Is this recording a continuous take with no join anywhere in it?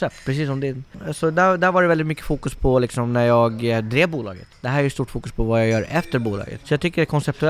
no; 1 cut; at 6.5 s

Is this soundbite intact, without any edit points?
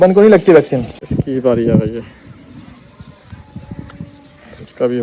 no; 1 cut; at 1.0 s

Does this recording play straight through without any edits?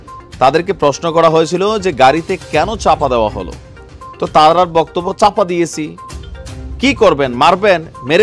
yes; 0 cuts

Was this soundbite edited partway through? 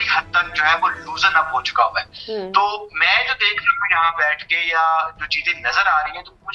no; 0 cuts

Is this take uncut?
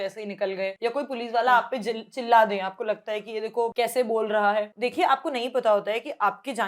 no; 3 cuts; at 0.8 s, 3.7 s, 4.7 s

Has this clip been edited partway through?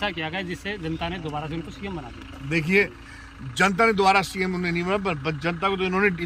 no; 0 cuts

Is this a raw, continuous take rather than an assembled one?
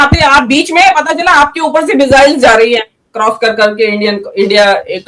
yes; 0 cuts

